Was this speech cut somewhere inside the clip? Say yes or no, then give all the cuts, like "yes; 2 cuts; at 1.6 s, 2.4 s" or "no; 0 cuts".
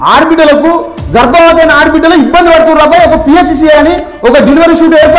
no; 0 cuts